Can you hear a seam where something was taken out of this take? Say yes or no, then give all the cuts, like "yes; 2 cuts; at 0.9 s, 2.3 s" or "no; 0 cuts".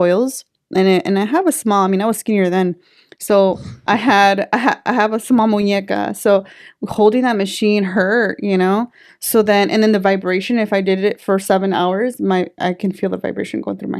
no; 0 cuts